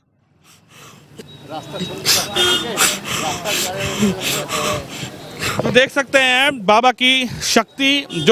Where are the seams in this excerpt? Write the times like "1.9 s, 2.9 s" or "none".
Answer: none